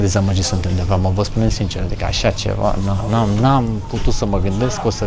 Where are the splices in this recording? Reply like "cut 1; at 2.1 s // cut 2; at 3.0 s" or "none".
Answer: none